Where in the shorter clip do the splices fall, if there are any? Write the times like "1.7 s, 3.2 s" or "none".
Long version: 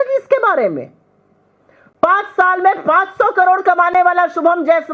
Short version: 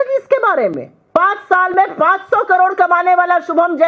0.9 s